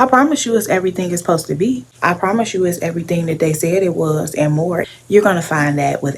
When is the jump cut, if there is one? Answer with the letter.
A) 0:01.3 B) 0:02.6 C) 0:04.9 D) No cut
C